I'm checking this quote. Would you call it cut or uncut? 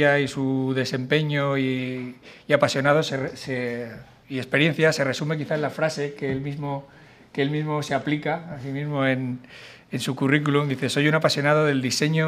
cut